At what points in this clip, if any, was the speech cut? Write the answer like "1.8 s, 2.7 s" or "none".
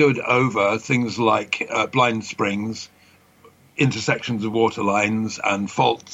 3.1 s